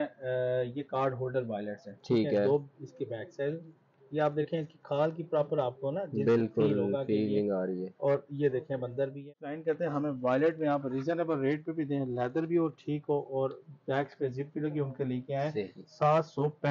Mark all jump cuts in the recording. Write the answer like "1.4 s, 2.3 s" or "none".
9.2 s